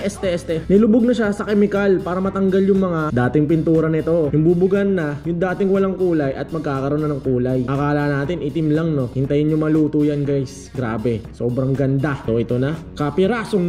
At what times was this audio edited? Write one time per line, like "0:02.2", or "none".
0:04.3
0:12.2